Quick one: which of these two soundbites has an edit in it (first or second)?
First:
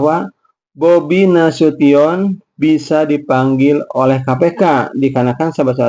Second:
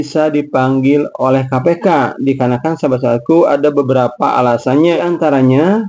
second